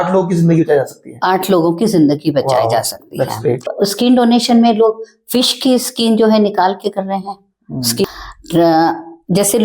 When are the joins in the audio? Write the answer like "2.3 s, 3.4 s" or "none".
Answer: 3.7 s, 8.0 s